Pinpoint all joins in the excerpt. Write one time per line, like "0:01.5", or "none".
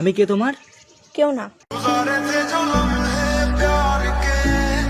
none